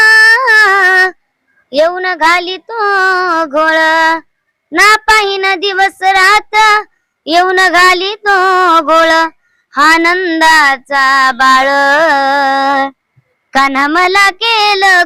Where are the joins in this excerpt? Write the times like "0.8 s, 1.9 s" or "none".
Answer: none